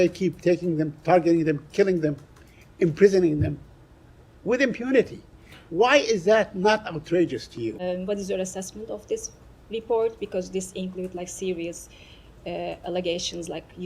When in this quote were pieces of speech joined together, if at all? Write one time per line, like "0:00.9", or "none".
0:07.8